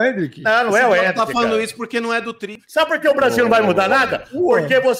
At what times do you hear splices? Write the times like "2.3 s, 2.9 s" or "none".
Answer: 2.6 s